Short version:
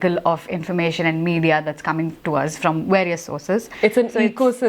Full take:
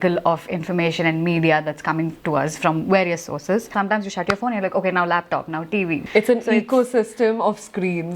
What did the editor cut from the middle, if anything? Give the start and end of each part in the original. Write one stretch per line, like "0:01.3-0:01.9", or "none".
0:03.7-0:06.0